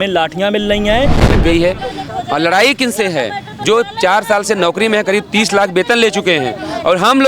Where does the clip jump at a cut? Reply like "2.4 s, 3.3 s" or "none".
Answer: 1.3 s